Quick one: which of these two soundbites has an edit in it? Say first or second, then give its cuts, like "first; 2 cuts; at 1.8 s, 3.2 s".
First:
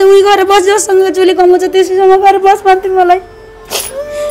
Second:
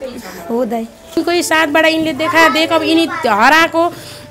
second; 1 cut; at 1.2 s